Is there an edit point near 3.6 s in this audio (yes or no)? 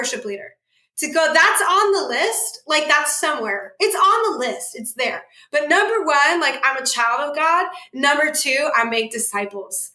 yes